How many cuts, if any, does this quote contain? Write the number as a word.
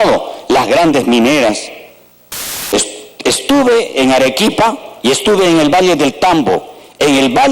one